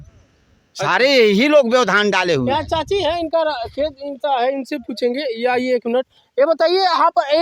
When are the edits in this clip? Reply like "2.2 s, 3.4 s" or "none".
none